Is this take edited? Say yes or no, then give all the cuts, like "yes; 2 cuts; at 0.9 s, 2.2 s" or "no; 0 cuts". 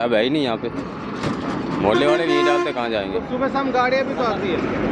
no; 0 cuts